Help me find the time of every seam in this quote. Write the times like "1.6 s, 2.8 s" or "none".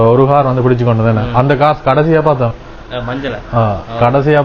none